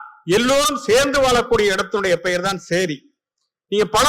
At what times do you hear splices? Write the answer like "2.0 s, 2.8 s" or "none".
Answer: none

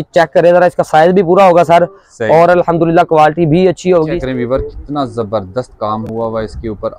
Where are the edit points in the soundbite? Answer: 4.2 s

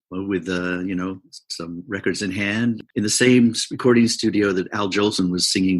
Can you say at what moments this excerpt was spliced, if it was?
2.8 s

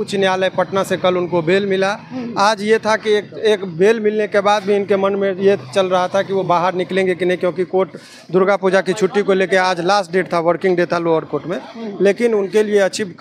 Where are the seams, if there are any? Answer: none

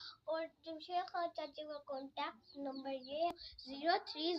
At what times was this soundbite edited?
3.4 s

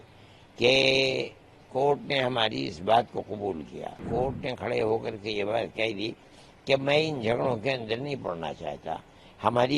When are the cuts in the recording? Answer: 4.0 s

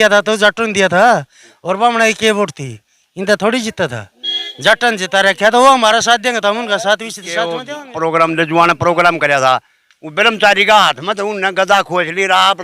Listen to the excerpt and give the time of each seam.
7.6 s

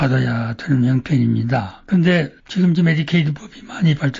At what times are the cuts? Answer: 1.7 s

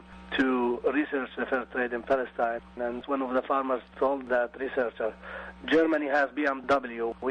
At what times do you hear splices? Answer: none

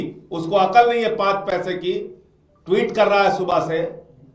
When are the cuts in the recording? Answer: none

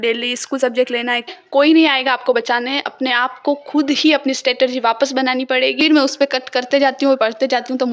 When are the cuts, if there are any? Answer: 1.4 s, 5.8 s

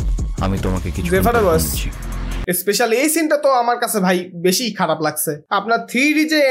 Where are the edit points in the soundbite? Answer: 2.4 s, 5.3 s

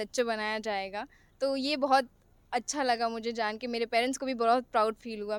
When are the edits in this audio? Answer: none

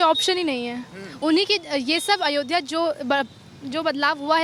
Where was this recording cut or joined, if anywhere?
none

